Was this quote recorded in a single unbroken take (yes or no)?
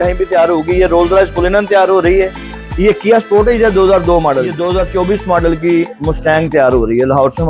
no